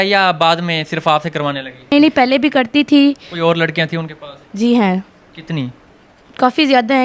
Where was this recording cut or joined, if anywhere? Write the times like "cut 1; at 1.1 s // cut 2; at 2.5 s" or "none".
cut 1; at 1.9 s // cut 2; at 3.3 s